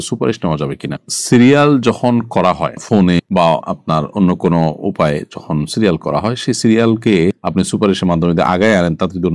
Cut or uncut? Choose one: uncut